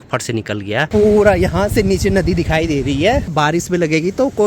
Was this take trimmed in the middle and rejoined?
yes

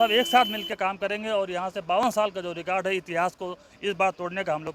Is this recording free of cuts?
yes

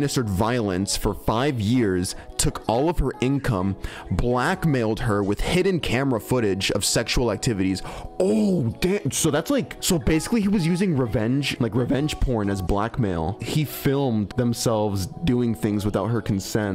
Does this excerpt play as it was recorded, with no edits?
yes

